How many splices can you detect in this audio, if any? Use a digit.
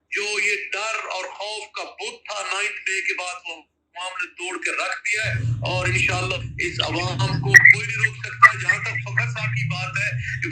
0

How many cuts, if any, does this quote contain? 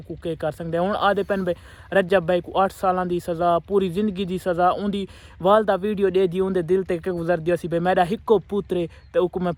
0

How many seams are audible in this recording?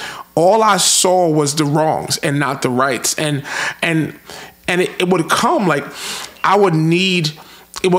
0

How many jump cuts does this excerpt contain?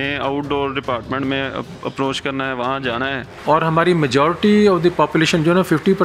1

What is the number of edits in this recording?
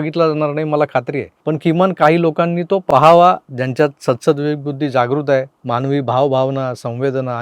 1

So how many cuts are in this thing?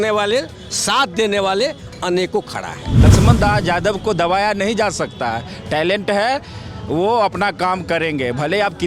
1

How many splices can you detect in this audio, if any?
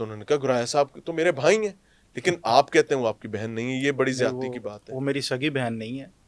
0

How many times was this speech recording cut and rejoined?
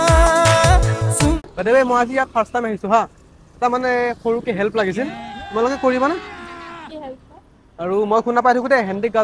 1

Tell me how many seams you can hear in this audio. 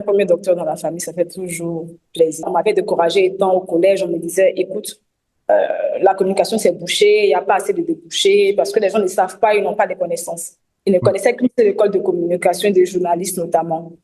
1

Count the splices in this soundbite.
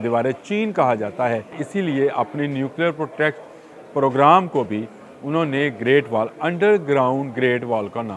1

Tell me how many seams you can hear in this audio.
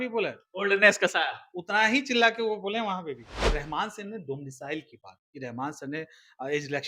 1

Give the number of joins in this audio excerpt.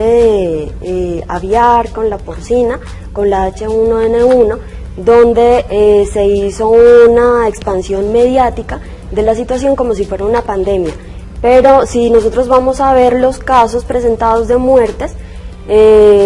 1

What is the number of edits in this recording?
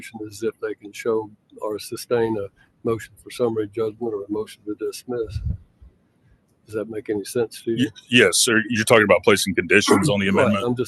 0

